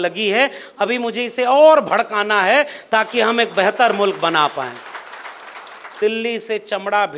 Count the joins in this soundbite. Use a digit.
1